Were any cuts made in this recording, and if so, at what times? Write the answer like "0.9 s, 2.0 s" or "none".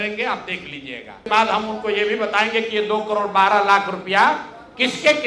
1.2 s